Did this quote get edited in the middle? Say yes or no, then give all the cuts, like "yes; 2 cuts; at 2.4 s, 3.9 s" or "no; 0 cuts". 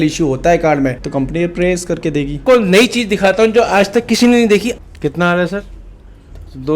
yes; 2 cuts; at 2.4 s, 4.8 s